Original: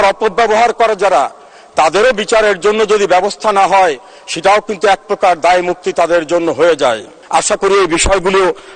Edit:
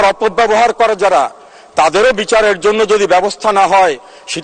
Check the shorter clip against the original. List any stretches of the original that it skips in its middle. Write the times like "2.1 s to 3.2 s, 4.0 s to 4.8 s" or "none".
none